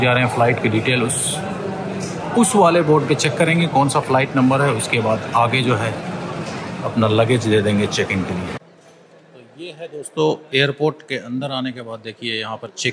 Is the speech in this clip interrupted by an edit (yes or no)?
no